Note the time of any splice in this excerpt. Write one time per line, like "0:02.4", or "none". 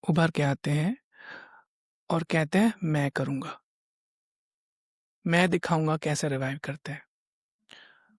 none